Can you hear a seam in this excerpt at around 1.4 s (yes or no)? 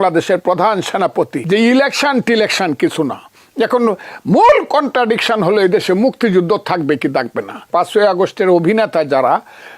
yes